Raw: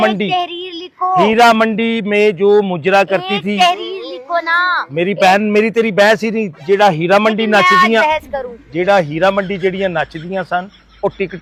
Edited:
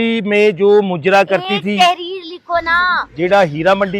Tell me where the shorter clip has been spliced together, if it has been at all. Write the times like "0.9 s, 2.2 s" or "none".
3.0 s